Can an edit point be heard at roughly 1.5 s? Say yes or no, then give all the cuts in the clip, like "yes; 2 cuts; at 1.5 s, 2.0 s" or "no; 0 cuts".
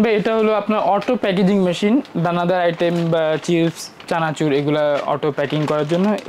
no; 0 cuts